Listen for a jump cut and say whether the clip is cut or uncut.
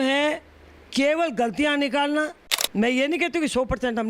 cut